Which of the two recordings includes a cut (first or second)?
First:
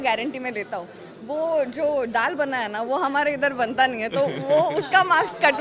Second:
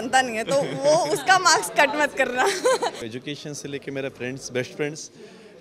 second